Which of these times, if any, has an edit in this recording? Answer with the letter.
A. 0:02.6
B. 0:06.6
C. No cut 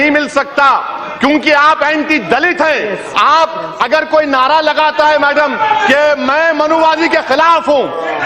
A